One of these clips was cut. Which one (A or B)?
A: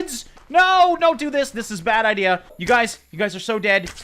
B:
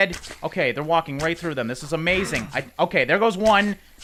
A